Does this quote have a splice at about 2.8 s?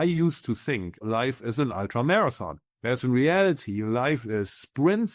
no; 1 cut; at 1.0 s

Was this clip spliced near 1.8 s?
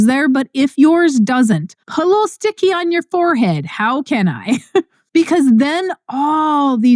yes; 2 cuts; at 1.8 s, 5.0 s

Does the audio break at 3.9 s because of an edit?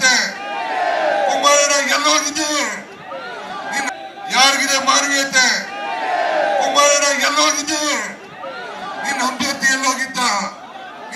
yes; 1 cut; at 3.9 s

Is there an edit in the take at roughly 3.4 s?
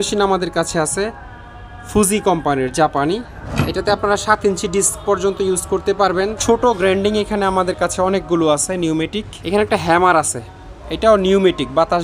yes; 3 cuts; at 3.4 s, 6.4 s, 9.3 s

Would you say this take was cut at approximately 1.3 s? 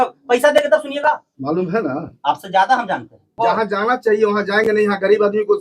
yes; 2 cuts; at 1.3 s, 3.4 s

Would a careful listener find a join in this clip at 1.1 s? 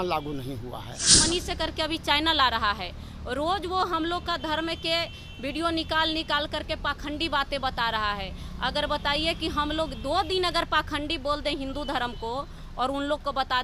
yes; 1 cut; at 1.1 s

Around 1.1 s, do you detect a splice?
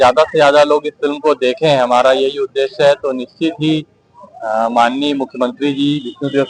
no; 0 cuts

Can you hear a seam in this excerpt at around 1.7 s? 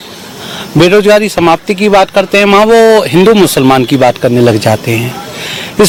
no; 0 cuts

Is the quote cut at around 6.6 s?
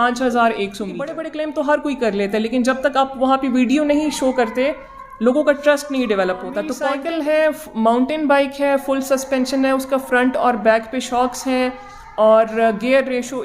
yes; 2 cuts; at 1.2 s, 6.6 s

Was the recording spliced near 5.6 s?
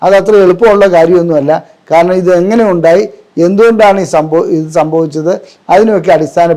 no; 0 cuts

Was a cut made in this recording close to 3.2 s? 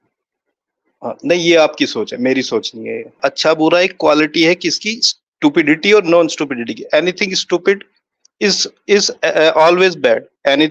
yes; 1 cut; at 3.2 s

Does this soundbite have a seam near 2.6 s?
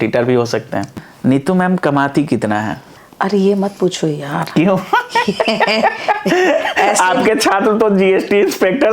no; 1 cut; at 1.0 s

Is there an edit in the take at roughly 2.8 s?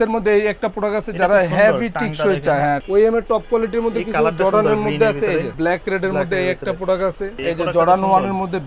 yes; 3 cuts; at 2.8 s, 5.5 s, 7.4 s

